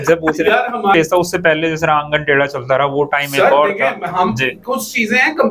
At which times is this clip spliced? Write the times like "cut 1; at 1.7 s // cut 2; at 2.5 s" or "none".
cut 1; at 0.9 s